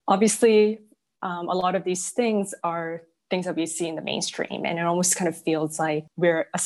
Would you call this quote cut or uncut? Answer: uncut